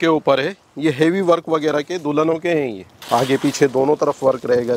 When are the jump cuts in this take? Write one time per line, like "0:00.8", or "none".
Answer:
0:02.9